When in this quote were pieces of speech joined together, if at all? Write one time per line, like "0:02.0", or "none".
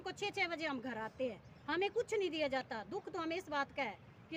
none